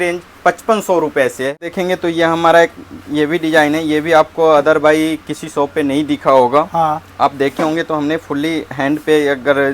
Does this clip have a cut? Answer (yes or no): yes